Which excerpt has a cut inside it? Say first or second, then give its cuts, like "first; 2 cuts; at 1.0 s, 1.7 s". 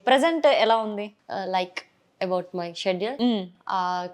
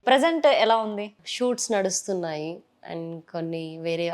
second; 1 cut; at 1.2 s